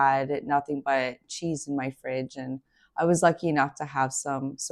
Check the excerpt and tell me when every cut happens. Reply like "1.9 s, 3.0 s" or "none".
none